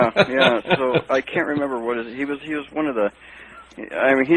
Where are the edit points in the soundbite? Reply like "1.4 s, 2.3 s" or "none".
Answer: 2.7 s